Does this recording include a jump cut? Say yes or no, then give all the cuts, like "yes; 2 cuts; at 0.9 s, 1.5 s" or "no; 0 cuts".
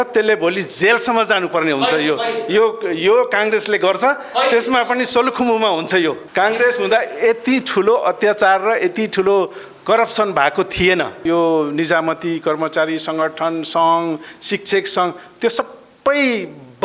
yes; 2 cuts; at 6.2 s, 11.2 s